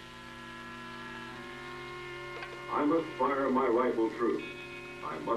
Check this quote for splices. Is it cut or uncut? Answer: cut